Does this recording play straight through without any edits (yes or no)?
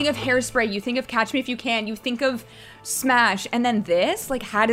yes